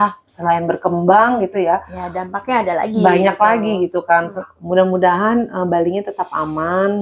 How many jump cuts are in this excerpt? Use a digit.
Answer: 1